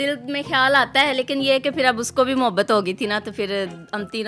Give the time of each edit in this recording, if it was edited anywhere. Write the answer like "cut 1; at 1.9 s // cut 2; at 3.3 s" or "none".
none